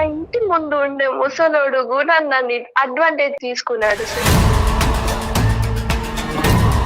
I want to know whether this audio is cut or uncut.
cut